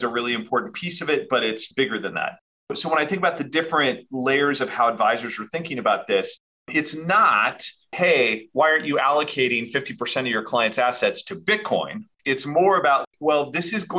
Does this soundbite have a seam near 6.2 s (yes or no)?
no